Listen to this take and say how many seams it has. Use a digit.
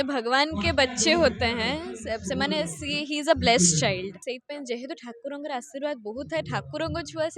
1